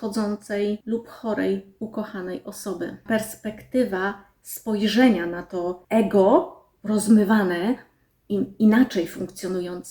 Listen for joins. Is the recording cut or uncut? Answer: cut